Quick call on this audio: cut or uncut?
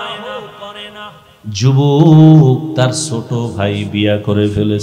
cut